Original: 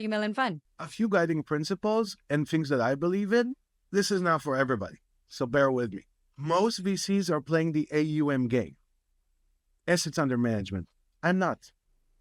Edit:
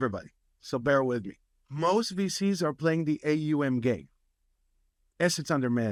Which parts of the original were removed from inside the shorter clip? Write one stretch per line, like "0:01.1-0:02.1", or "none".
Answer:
none